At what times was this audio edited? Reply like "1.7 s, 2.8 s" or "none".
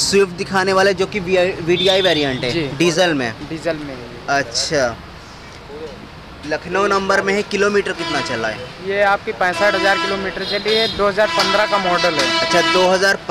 none